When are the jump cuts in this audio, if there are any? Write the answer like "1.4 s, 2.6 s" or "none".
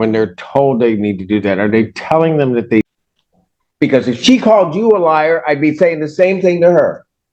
2.8 s